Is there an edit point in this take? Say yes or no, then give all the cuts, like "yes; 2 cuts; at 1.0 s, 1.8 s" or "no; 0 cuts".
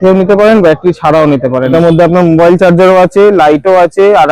yes; 1 cut; at 1.7 s